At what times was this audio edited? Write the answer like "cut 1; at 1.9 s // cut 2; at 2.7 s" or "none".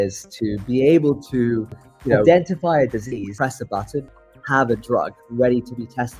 cut 1; at 3.3 s // cut 2; at 4.2 s